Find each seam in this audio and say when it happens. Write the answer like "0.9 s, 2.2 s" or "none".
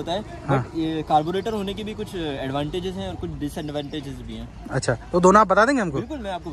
none